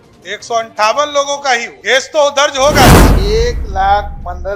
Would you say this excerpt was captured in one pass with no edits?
no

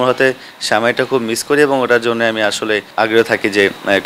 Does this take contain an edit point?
yes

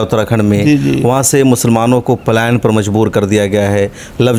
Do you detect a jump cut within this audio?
no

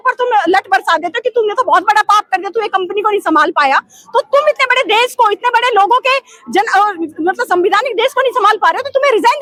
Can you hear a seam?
no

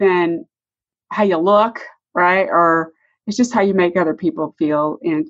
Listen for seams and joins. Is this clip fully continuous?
yes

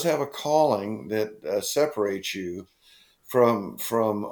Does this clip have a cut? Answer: no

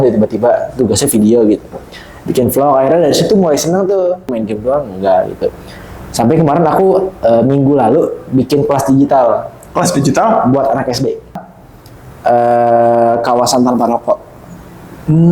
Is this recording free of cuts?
no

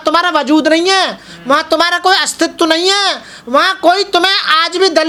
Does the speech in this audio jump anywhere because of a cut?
no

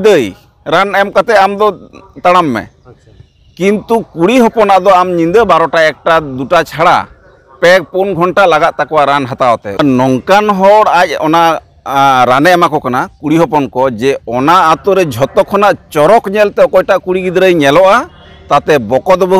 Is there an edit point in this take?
yes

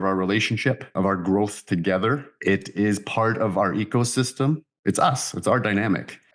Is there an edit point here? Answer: yes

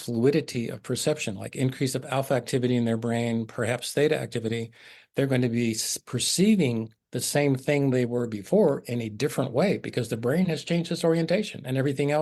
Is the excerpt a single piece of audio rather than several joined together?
yes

